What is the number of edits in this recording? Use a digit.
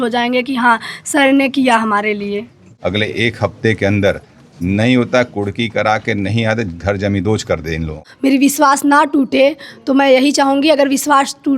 2